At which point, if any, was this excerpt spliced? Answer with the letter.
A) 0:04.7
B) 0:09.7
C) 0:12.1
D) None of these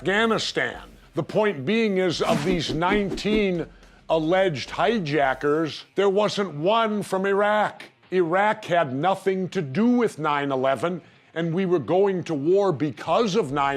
A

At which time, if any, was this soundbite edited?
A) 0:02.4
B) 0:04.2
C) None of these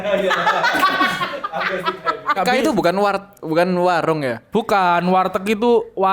A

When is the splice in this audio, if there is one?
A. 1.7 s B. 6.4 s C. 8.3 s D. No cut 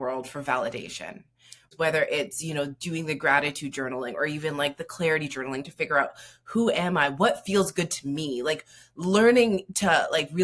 A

